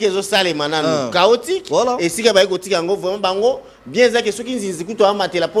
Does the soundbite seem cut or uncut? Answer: uncut